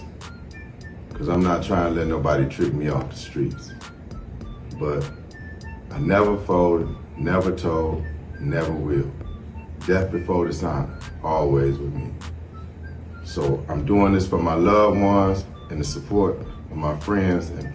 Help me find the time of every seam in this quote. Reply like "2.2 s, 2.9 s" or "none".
none